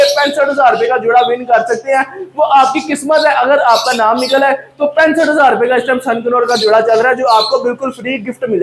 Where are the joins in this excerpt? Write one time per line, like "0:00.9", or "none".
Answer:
none